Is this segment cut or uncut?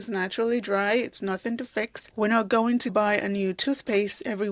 cut